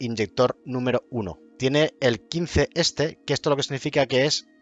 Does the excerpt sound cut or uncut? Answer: cut